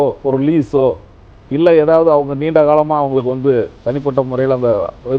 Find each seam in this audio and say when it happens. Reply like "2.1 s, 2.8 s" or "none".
none